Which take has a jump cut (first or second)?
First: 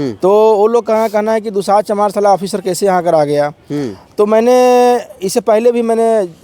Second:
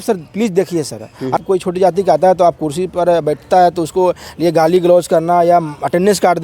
second